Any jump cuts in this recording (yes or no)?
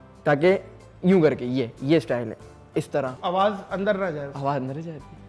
yes